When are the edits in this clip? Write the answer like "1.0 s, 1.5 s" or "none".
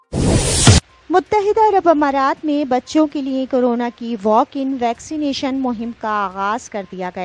0.9 s